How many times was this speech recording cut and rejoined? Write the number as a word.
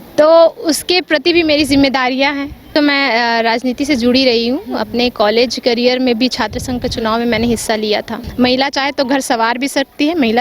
two